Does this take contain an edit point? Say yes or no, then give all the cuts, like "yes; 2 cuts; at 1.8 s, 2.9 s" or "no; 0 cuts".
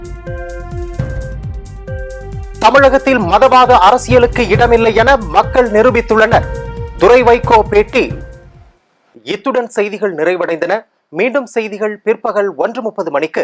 no; 0 cuts